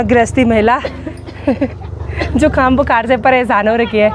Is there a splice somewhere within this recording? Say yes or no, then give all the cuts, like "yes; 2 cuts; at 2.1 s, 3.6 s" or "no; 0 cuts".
no; 0 cuts